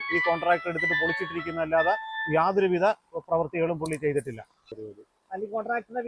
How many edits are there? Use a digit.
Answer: 1